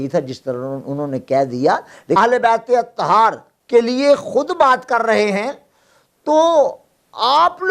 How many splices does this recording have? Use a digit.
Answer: 1